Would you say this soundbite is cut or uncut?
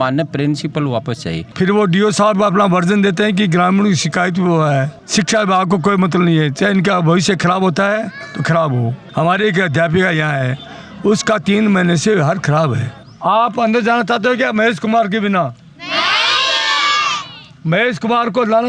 cut